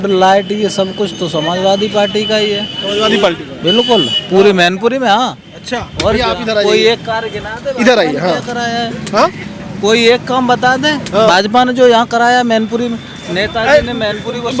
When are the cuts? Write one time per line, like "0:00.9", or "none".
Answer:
none